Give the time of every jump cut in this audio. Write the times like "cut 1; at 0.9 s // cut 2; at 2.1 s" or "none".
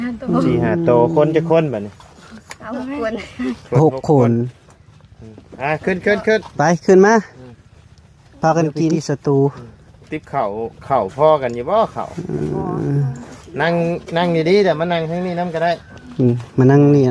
cut 1; at 9.0 s